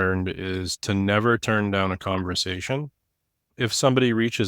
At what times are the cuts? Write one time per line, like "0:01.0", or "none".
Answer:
0:03.5